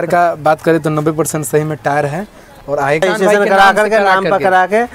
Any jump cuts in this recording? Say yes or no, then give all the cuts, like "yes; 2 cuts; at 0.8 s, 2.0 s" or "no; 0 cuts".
yes; 1 cut; at 3.0 s